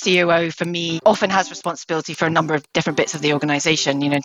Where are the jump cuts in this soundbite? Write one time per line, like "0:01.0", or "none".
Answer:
0:00.9